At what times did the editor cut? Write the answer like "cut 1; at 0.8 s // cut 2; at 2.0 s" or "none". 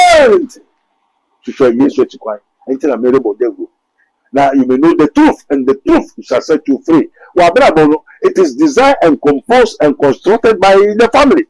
none